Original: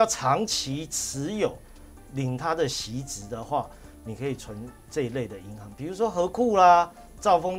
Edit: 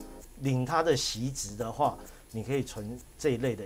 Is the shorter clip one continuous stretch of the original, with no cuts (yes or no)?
yes